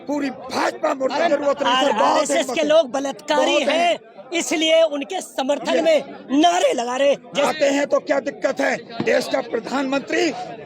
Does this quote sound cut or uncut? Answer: cut